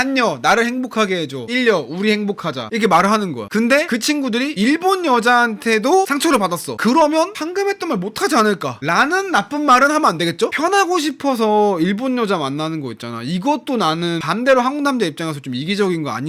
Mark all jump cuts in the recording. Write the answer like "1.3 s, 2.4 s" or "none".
10.5 s